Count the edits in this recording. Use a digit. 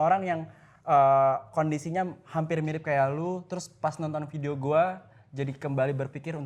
0